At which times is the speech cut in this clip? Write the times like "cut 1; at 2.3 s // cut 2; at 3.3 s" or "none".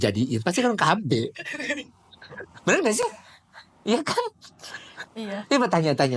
none